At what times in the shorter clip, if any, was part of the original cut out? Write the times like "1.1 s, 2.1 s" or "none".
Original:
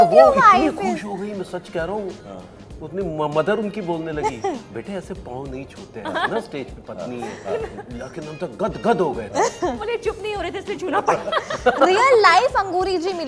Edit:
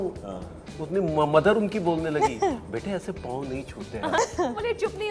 4.2 s